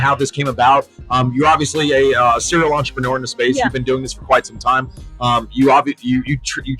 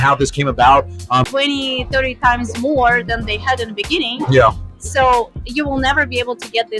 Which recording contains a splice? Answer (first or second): second